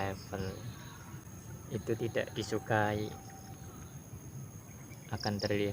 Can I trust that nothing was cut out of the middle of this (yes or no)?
no